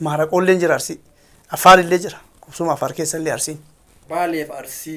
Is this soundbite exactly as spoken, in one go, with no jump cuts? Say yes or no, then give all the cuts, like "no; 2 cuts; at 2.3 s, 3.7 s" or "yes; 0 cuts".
no; 1 cut; at 4.0 s